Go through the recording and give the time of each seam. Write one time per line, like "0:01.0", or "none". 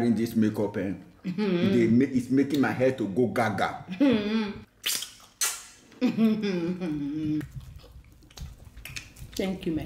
0:04.6
0:07.4